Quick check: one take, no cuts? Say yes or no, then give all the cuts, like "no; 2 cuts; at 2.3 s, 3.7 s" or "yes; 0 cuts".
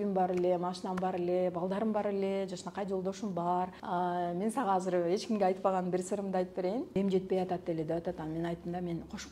no; 2 cuts; at 3.8 s, 6.9 s